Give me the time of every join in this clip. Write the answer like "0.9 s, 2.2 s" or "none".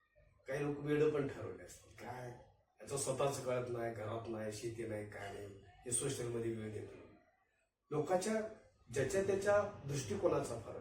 none

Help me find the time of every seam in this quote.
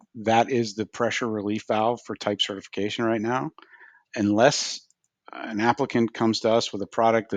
none

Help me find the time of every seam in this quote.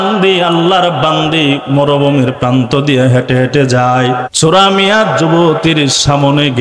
4.3 s

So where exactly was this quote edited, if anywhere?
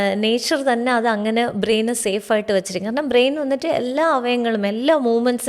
none

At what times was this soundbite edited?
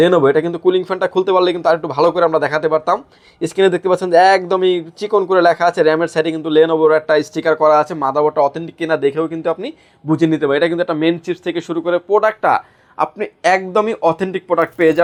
none

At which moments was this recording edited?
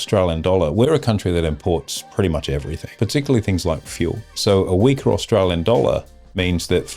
2.0 s, 2.8 s, 4.3 s

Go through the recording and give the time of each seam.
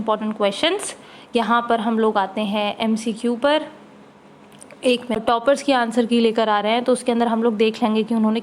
5.5 s

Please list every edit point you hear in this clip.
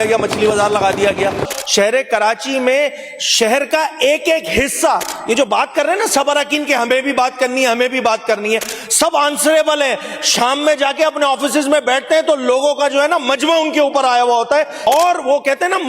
1.5 s, 14.7 s

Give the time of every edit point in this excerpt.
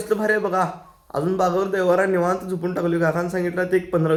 none

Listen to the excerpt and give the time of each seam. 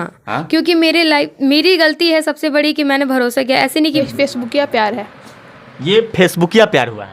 3.9 s

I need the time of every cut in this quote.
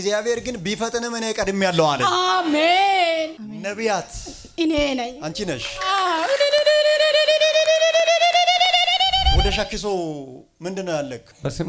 3.3 s, 9.4 s

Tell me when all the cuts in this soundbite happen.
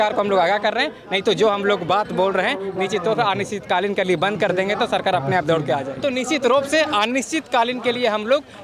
5.9 s

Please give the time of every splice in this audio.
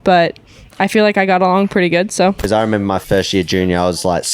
2.9 s

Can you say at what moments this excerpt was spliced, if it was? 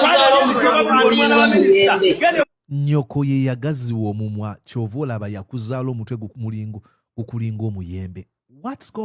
none

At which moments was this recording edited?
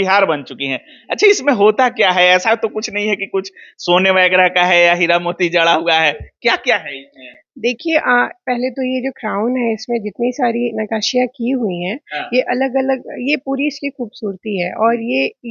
none

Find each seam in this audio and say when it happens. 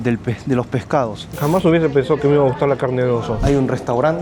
1.2 s, 3.4 s

